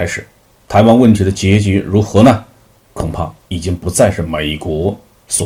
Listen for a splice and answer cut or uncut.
uncut